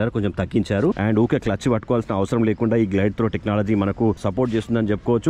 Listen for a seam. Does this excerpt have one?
yes; 2 cuts; at 1.0 s, 4.2 s

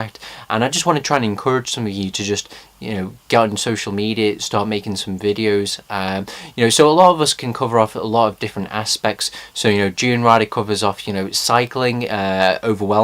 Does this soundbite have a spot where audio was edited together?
yes; 1 cut; at 2.0 s

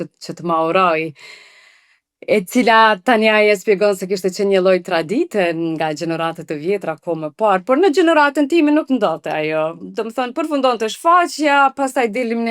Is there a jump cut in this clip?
no; 0 cuts

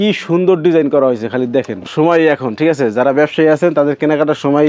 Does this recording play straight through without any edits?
no; 1 cut; at 1.9 s

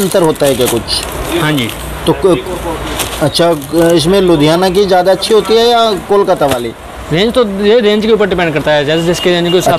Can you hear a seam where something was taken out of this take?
no; 0 cuts

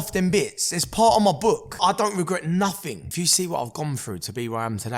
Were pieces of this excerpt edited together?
yes; 2 cuts; at 1.8 s, 3.0 s

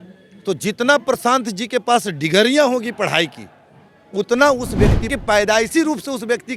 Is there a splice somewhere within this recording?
yes; 1 cut; at 5.1 s

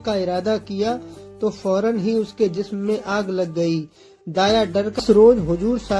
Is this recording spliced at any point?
yes; 1 cut; at 5.0 s

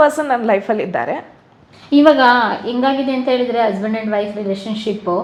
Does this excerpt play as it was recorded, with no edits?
yes; 0 cuts

